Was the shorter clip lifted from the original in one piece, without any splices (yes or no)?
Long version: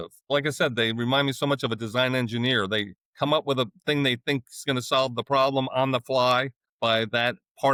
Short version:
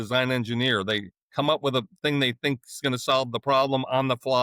yes